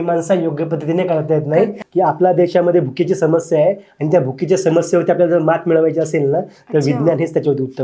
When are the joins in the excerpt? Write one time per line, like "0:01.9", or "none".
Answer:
0:01.8